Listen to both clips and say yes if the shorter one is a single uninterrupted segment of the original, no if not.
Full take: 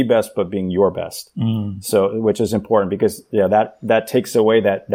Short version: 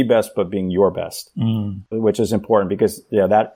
no